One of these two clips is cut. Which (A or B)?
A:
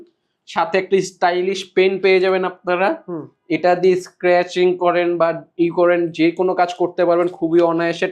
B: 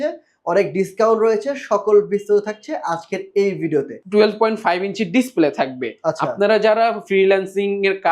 B